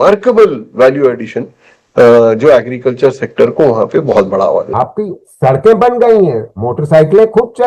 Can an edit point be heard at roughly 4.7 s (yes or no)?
yes